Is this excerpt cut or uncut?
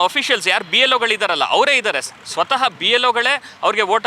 uncut